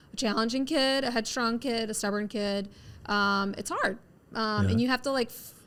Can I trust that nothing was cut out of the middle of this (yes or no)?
yes